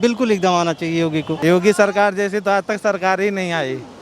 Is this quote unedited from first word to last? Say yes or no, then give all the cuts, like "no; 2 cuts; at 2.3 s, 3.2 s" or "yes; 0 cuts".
no; 1 cut; at 1.3 s